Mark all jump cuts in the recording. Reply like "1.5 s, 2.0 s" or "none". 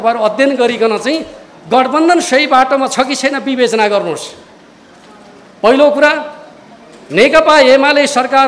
none